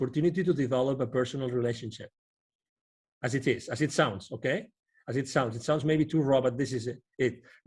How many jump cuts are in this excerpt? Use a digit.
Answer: 0